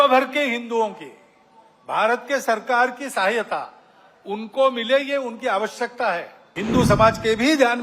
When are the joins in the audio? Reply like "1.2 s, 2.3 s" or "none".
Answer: 6.4 s